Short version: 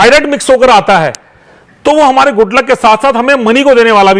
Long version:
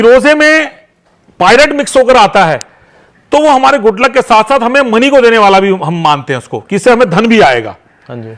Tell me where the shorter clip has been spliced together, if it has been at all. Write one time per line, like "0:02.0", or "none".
none